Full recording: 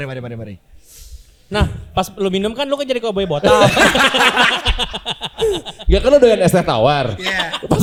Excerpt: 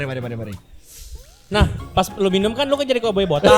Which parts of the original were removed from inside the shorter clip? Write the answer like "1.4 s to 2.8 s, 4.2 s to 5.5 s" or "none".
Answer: none